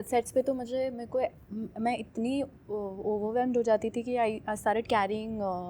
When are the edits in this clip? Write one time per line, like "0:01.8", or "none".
none